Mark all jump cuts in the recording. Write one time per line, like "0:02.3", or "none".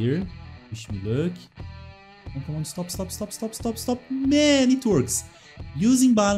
none